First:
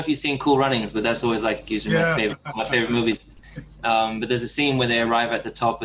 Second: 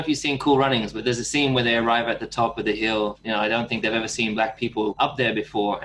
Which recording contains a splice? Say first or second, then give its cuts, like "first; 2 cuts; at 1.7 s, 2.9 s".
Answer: second; 3 cuts; at 1.0 s, 3.2 s, 5.0 s